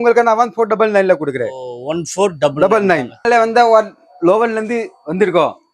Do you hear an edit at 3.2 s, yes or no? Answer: yes